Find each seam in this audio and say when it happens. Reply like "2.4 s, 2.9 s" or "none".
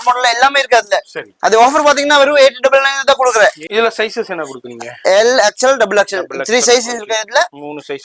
3.6 s